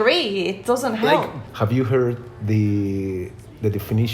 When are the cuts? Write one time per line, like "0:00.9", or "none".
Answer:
0:01.4